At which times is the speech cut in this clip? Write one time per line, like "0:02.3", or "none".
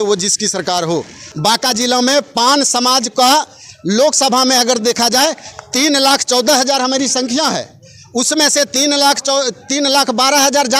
0:01.2